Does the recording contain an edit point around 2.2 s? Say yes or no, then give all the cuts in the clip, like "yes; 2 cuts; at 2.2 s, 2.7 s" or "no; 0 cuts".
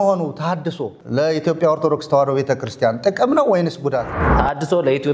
no; 2 cuts; at 0.9 s, 4.3 s